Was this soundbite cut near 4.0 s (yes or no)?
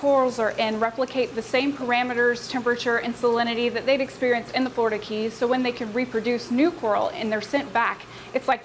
no